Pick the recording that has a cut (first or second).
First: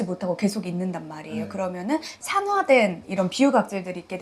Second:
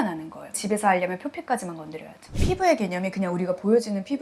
second